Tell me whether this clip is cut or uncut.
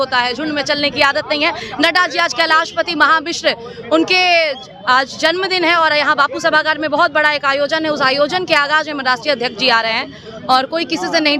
uncut